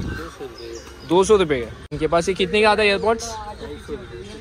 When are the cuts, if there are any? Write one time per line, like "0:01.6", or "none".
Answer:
0:02.0